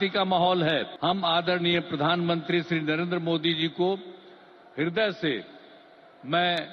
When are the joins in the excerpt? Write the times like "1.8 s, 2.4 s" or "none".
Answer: 0.9 s